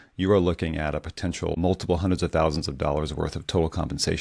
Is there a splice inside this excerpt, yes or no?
yes